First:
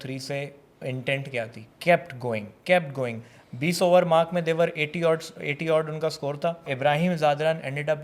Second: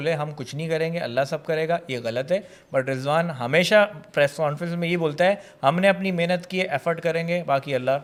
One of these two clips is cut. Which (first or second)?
first